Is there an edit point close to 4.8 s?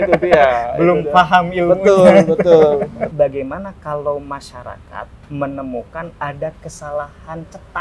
no; 1 cut; at 3.1 s

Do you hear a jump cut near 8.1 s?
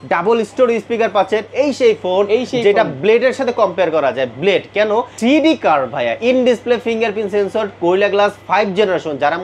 no; 2 cuts; at 1.5 s, 5.1 s

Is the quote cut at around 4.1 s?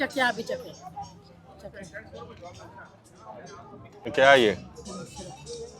yes; 1 cut; at 4.1 s

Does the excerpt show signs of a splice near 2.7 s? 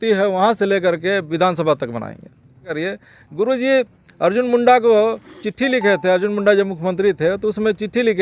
yes; 1 cut; at 2.7 s

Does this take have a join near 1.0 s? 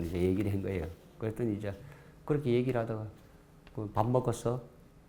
no; 0 cuts

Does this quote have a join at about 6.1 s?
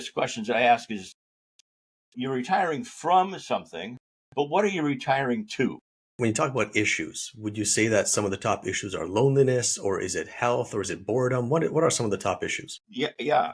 yes; 1 cut; at 6.1 s

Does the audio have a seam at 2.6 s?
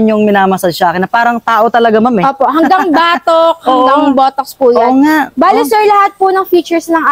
no; 0 cuts

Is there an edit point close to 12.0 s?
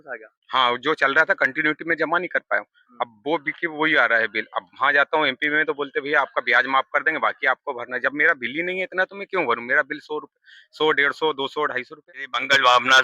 yes; 1 cut; at 12.0 s

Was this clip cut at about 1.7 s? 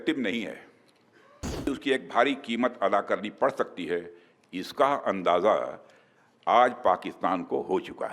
yes; 1 cut; at 1.7 s

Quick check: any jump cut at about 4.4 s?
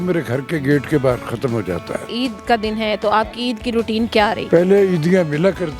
yes; 2 cuts; at 2.1 s, 4.4 s

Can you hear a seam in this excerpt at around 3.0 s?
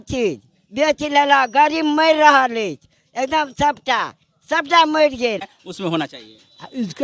no; 1 cut; at 5.6 s

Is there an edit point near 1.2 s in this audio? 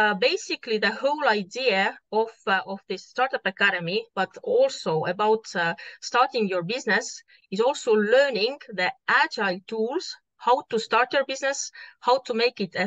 no; 0 cuts

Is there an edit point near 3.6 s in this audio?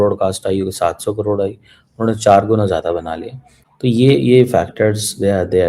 yes; 1 cut; at 3.6 s

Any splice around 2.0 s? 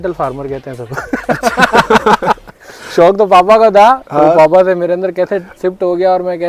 no; 0 cuts

